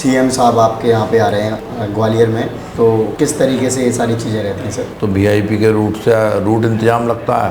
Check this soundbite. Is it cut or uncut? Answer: cut